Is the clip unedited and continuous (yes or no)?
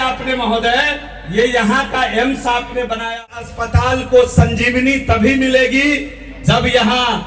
no